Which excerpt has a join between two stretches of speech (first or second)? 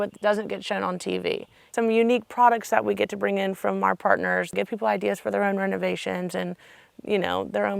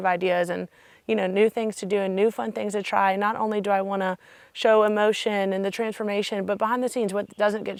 first